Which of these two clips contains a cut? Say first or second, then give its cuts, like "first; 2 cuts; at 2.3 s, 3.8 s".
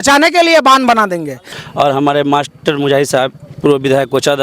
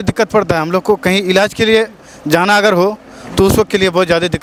first; 1 cut; at 1.5 s